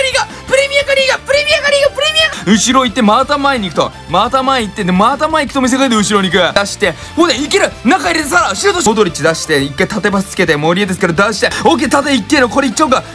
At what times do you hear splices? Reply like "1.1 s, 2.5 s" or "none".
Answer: 2.3 s, 6.5 s, 8.8 s, 11.5 s